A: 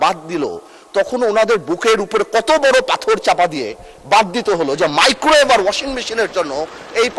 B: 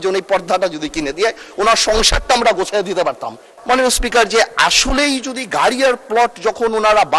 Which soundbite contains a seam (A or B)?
B